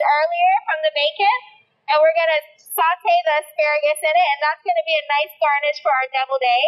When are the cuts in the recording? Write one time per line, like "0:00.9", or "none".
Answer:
none